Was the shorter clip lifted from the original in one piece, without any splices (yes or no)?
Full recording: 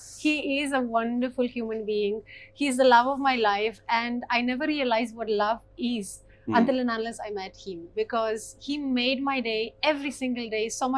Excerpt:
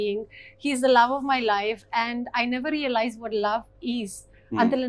yes